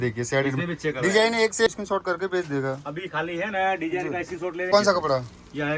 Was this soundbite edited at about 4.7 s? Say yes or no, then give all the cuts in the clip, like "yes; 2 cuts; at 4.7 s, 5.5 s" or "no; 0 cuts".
yes; 2 cuts; at 1.7 s, 4.7 s